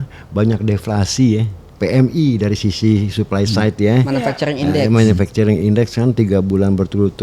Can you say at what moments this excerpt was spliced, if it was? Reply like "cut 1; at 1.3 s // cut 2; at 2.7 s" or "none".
cut 1; at 1.7 s